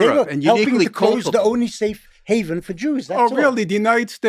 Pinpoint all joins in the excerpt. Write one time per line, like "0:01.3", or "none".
none